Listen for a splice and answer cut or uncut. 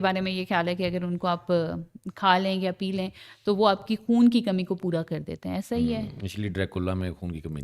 uncut